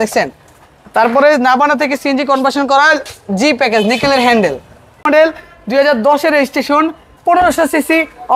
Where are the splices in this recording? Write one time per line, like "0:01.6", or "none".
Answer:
0:05.0